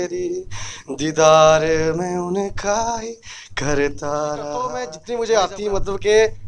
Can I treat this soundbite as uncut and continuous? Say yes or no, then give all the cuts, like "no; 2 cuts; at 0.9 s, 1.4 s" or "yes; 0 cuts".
no; 1 cut; at 4.9 s